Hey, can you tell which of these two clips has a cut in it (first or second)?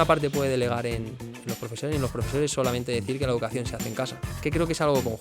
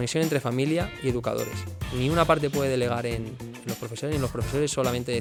first